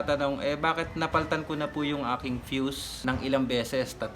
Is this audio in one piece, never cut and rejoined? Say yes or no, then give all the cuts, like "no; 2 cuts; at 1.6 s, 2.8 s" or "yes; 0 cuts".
no; 1 cut; at 2.9 s